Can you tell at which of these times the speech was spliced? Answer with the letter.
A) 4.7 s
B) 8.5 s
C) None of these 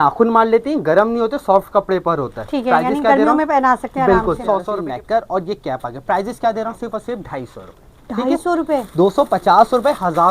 A